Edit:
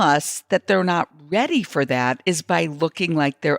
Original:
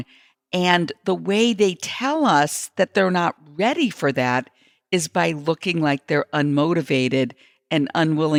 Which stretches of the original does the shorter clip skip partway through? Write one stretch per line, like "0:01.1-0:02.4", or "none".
0:04.5-0:04.8